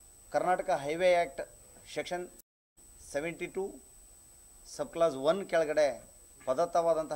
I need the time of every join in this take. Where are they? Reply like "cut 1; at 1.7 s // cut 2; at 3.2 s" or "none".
none